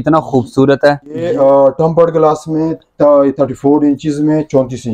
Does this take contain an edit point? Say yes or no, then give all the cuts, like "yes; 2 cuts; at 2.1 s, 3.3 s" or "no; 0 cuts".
yes; 1 cut; at 1.3 s